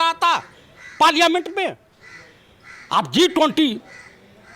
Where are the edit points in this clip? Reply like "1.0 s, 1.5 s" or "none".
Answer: none